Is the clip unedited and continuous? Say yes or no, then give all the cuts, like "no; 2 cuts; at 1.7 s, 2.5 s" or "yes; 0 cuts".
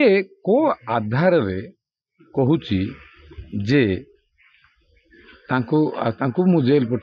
yes; 0 cuts